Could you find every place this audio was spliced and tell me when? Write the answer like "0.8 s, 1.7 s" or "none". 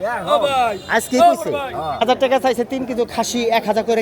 2.0 s